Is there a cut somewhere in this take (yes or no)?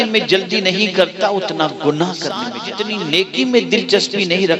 yes